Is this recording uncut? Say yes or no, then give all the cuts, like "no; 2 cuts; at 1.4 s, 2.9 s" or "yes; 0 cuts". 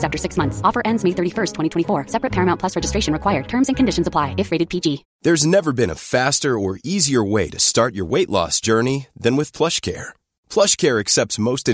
no; 1 cut; at 5.1 s